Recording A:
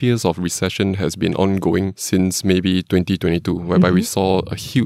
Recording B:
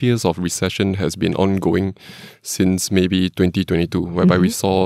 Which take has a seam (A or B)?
A